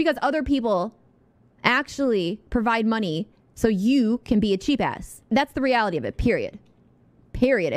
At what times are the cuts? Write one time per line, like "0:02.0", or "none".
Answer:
0:05.3